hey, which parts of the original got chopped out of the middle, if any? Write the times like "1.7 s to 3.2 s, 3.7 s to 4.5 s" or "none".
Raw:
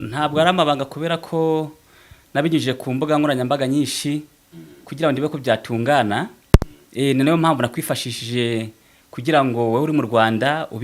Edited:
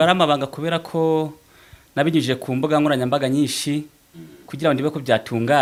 none